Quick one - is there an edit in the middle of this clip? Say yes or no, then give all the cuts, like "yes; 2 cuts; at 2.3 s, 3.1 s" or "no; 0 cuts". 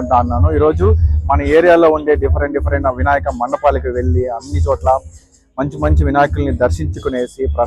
no; 0 cuts